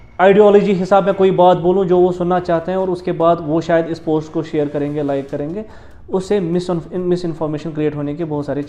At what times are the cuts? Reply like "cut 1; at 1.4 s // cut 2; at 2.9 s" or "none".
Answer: none